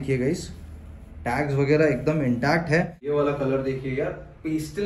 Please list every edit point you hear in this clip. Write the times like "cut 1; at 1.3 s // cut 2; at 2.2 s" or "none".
cut 1; at 3.0 s